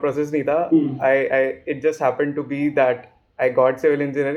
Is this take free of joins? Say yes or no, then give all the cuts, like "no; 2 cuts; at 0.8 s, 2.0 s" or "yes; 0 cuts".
yes; 0 cuts